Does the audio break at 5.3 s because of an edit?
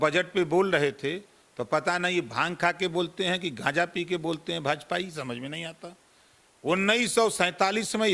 no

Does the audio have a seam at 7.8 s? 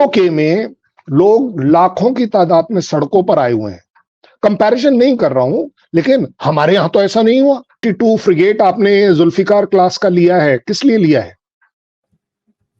yes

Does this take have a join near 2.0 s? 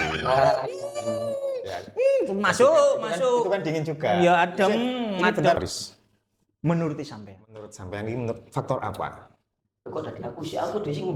no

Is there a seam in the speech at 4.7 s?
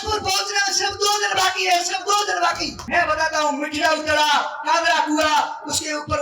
no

